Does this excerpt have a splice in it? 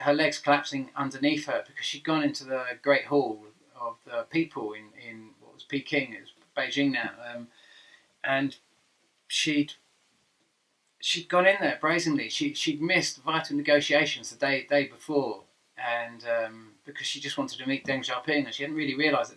no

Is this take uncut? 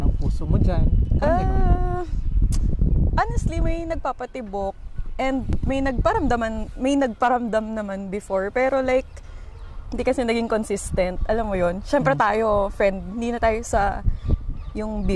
yes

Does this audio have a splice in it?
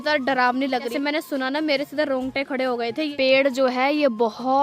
yes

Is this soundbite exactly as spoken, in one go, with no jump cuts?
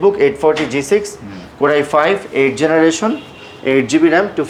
yes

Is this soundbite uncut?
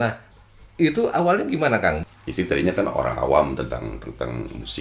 no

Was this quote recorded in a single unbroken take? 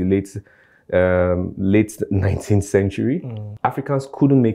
no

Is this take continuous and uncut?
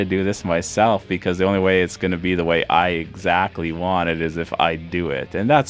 yes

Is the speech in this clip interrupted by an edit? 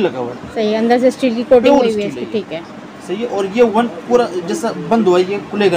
no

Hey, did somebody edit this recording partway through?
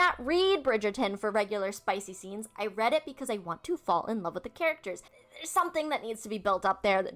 yes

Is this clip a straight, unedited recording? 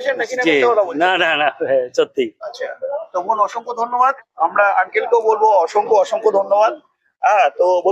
yes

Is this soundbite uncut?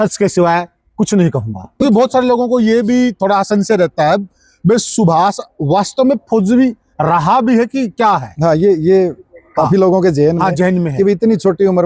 no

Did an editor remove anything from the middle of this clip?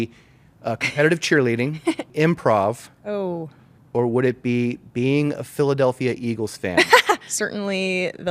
yes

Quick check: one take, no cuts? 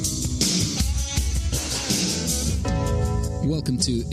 yes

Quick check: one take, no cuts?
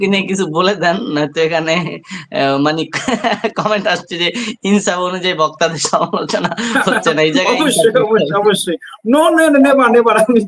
yes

